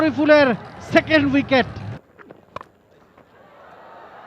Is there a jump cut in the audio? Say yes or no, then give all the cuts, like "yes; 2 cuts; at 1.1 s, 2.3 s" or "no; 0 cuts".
yes; 1 cut; at 2.0 s